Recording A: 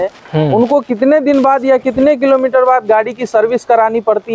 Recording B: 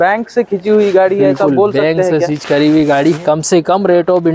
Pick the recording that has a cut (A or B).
B